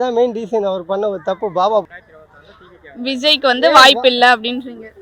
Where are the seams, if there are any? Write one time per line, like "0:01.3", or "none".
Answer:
0:01.9